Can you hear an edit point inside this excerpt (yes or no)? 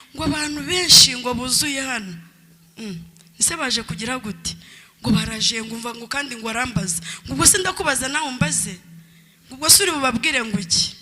no